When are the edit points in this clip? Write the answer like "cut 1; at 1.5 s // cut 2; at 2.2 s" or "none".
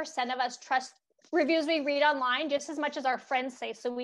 cut 1; at 1.0 s

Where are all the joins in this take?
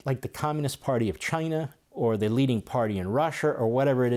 cut 1; at 1.8 s

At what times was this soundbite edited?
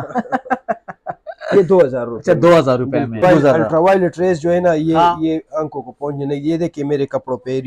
cut 1; at 3.2 s

